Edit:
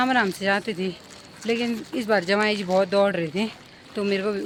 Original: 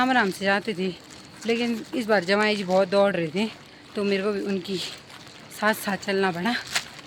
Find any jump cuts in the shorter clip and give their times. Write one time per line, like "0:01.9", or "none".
none